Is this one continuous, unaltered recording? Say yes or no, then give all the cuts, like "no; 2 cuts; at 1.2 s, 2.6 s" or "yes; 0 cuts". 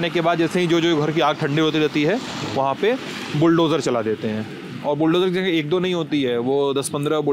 yes; 0 cuts